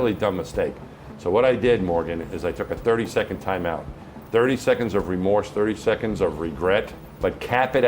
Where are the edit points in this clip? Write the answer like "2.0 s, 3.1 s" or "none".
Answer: 7.0 s